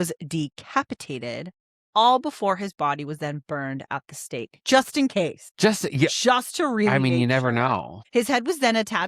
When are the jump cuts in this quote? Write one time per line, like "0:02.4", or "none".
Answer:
0:05.4
0:08.0